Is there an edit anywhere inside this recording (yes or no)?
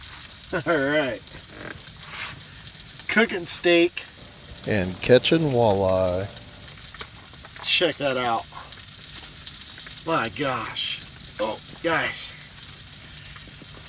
yes